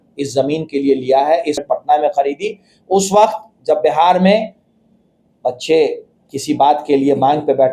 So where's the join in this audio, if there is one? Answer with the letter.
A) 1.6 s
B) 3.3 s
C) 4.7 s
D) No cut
A